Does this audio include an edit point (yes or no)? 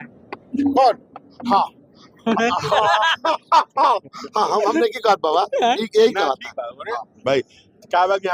no